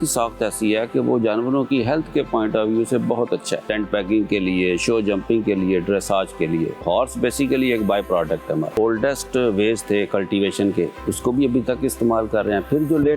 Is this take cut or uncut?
cut